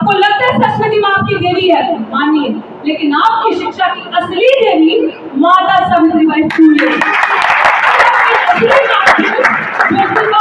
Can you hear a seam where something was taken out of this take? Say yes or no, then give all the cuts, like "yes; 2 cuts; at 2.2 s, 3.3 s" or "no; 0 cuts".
no; 0 cuts